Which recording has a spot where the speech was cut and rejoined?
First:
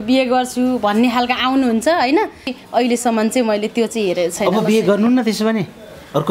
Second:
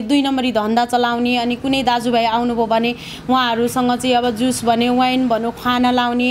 first; 1 cut; at 2.6 s

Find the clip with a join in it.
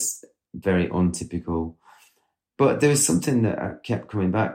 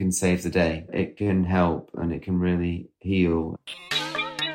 second; 2 cuts; at 1.0 s, 3.4 s

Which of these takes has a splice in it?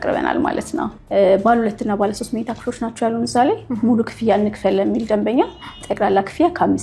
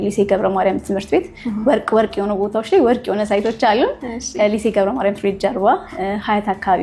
first; 1 cut; at 1.0 s

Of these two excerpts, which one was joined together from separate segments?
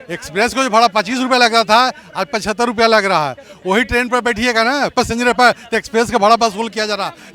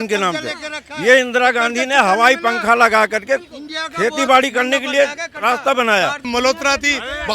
second; 1 cut; at 6.3 s

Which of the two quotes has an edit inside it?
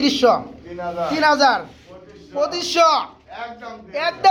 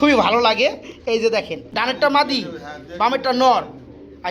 second; 1 cut; at 1.3 s

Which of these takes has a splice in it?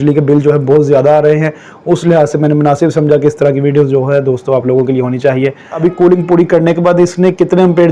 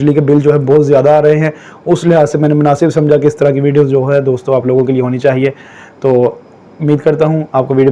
first; 1 cut; at 5.8 s

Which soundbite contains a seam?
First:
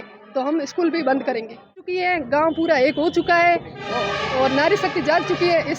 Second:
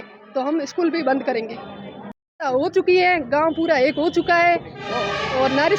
first; 1 cut; at 1.9 s

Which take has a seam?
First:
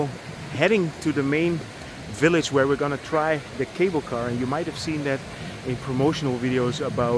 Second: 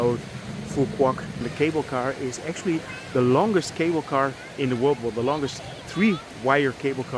second; 1 cut; at 1.4 s

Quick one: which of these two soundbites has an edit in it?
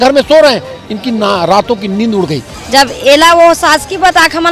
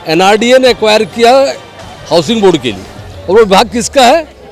first; 1 cut; at 2.5 s

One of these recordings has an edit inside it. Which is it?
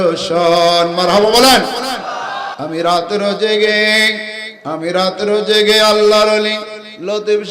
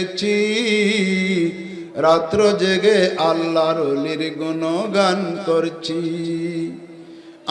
first; 1 cut; at 2.5 s

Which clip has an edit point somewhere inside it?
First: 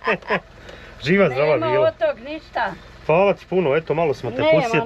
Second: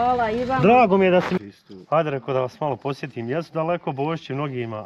second; 1 cut; at 1.4 s

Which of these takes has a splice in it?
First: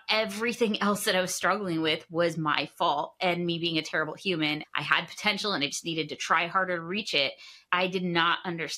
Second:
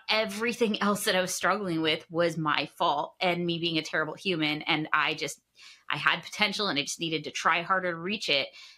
first; 2 cuts; at 4.6 s, 7.6 s

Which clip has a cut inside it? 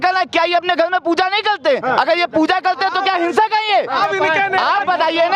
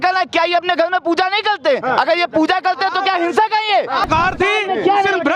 second; 1 cut; at 4.1 s

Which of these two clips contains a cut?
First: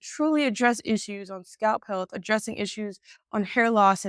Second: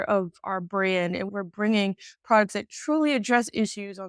second; 1 cut; at 1.3 s

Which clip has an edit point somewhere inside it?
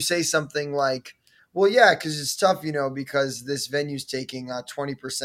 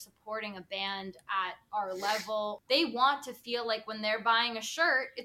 second; 1 cut; at 2.6 s

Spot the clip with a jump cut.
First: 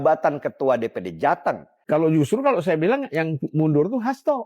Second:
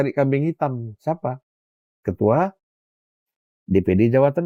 first; 1 cut; at 1.7 s

